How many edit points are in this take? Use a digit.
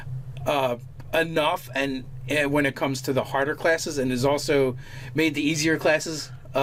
0